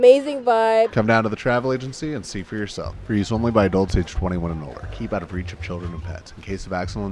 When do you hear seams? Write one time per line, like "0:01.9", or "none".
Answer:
0:00.9